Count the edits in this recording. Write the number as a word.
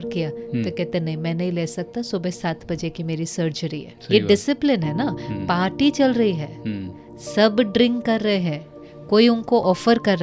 zero